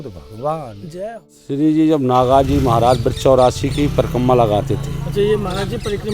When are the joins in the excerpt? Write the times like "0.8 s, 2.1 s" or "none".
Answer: 1.1 s